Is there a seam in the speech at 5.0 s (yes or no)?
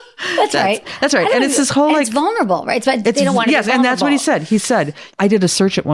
yes